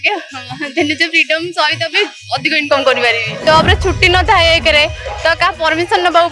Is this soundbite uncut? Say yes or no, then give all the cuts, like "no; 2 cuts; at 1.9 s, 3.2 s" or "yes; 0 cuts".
no; 1 cut; at 3.3 s